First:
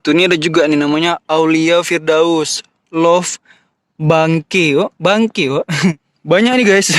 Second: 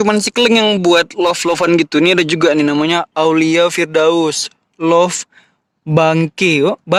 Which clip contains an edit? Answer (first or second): first